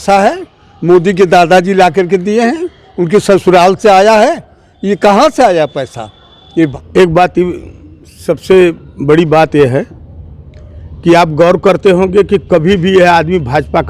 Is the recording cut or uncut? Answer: cut